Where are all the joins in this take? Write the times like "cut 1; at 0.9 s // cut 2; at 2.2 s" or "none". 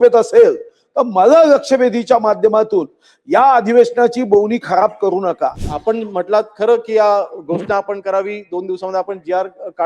cut 1; at 5.7 s